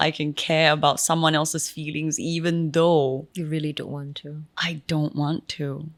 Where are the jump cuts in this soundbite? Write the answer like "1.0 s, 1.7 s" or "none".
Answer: none